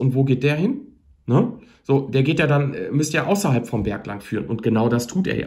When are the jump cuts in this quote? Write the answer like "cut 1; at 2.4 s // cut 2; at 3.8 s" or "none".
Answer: none